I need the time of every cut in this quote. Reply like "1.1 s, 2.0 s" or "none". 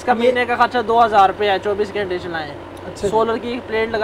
none